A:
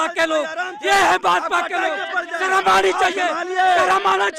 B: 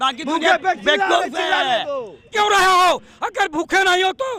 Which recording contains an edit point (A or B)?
B